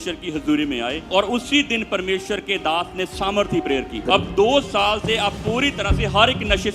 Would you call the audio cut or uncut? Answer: cut